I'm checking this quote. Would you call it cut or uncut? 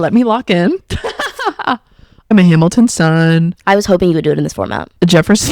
cut